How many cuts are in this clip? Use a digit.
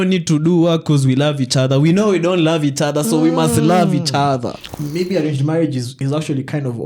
1